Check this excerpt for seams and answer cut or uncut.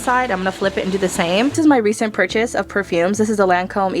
cut